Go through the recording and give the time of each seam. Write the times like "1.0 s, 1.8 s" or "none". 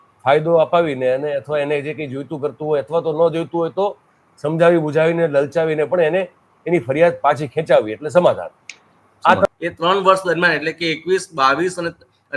9.4 s